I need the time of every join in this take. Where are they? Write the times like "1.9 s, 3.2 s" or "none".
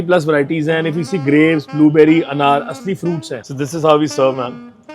3.4 s